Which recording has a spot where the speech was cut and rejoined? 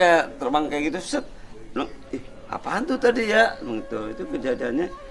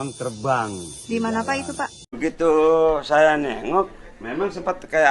second; 1 cut; at 2.0 s

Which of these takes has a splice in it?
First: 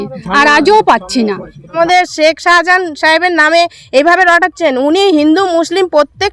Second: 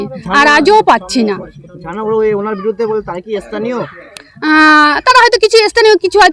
first; 1 cut; at 1.7 s

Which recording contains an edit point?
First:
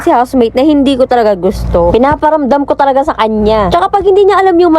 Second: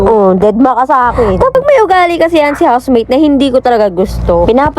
second; 1 cut; at 1.5 s

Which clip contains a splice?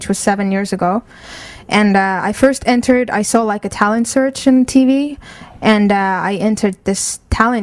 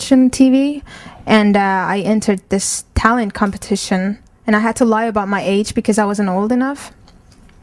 first; 1 cut; at 2.1 s

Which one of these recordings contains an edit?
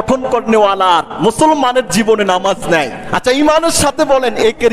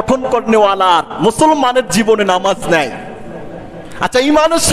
first; 1 cut; at 3.0 s

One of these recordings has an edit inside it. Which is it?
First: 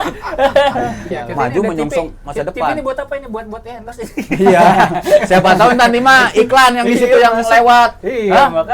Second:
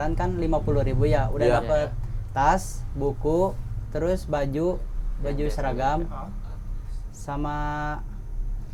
first; 1 cut; at 1.1 s

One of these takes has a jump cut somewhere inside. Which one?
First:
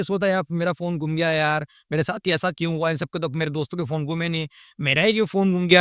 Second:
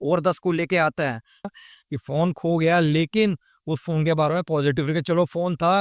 second; 1 cut; at 1.6 s

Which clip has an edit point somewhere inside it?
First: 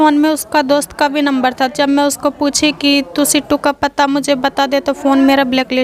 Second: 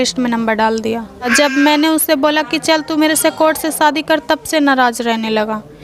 second; 1 cut; at 1.3 s

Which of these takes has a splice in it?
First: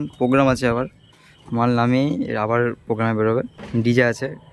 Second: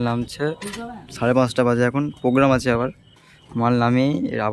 first; 1 cut; at 3.6 s

